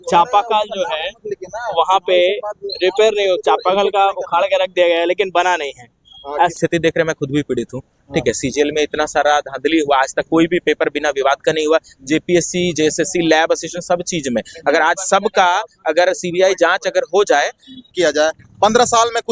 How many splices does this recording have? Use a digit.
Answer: 2